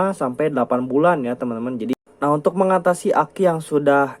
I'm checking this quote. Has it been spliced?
yes; 1 cut; at 1.9 s

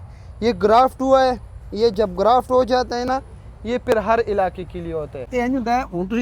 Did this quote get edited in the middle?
yes; 1 cut; at 5.2 s

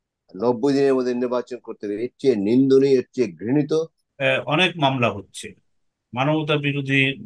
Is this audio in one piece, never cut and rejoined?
no; 1 cut; at 4.0 s

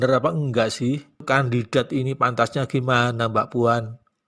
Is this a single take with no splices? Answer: no; 1 cut; at 1.2 s

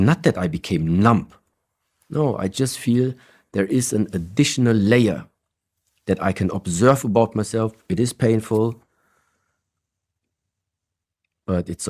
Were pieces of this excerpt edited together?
no; 0 cuts

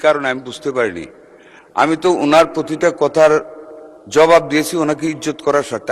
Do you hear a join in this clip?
no; 0 cuts

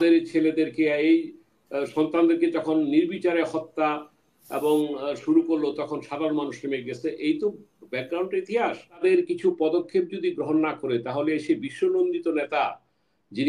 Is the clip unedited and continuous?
no; 1 cut; at 9.0 s

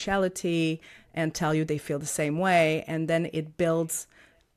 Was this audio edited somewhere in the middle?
no; 0 cuts

